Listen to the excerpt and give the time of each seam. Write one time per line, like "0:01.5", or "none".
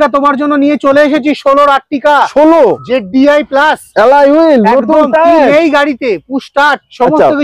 none